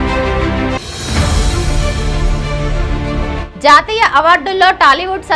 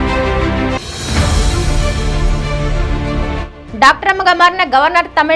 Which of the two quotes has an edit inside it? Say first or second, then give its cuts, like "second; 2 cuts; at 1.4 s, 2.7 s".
first; 1 cut; at 3.5 s